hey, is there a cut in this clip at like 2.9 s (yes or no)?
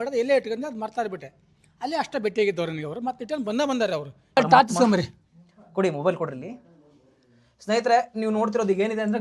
no